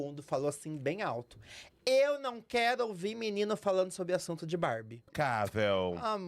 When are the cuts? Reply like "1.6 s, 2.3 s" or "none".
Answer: 5.1 s